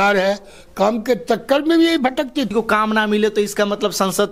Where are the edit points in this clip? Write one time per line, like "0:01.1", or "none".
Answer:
0:02.5